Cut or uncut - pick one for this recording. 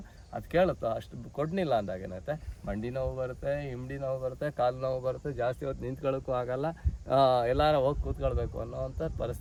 uncut